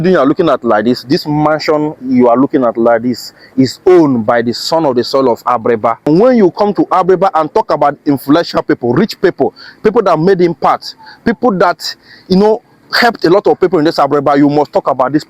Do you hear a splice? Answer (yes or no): yes